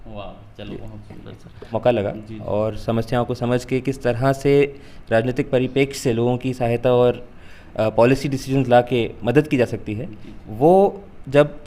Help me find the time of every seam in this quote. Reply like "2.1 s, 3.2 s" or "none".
1.7 s